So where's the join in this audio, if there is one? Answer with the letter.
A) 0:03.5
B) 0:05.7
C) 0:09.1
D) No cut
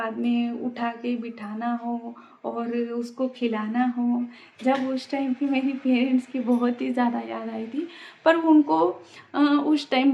D